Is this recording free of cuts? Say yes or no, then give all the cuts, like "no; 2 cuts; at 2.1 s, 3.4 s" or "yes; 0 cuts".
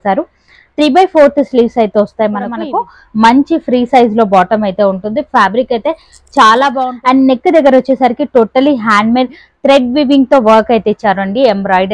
no; 2 cuts; at 2.6 s, 6.8 s